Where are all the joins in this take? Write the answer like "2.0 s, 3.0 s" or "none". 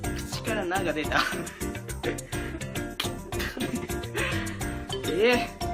3.0 s